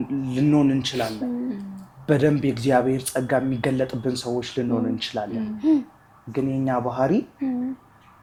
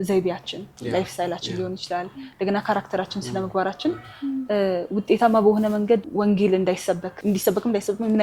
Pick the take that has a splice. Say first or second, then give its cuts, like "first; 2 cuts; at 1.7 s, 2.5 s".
second; 2 cuts; at 6.1 s, 7.1 s